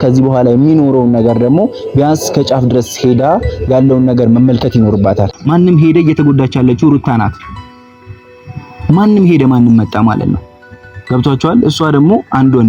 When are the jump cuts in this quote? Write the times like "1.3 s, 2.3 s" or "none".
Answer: 5.3 s